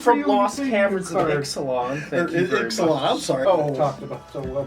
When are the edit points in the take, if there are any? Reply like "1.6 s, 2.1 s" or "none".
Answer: 3.4 s

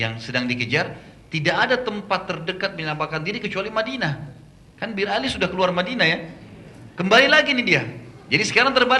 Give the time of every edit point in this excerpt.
none

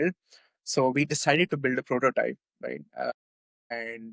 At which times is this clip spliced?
none

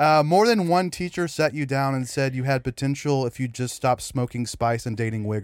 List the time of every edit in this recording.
none

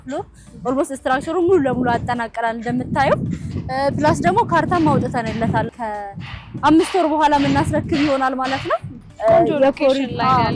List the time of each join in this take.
5.7 s, 9.1 s

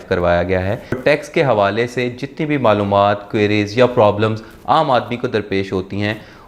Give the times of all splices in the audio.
1.0 s

